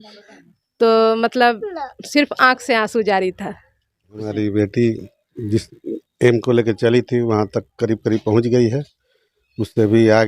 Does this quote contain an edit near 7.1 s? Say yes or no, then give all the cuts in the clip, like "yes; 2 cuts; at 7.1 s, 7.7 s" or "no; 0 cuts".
no; 1 cut; at 4.3 s